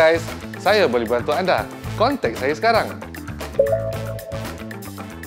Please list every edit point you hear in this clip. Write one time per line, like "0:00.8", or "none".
0:04.3